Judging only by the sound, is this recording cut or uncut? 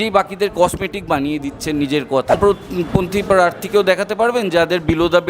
cut